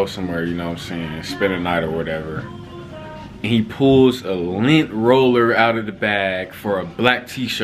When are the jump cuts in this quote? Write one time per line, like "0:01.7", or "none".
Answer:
none